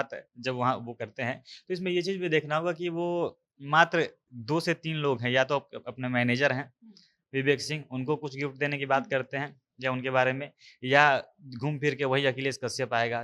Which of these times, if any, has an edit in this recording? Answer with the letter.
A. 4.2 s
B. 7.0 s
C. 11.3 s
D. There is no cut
D